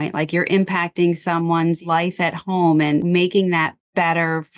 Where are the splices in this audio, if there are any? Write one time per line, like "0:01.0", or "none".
0:01.8
0:03.0